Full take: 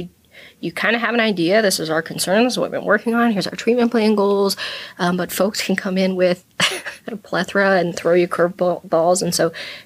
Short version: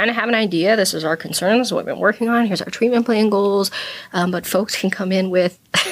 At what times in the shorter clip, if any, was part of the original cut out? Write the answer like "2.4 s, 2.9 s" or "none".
none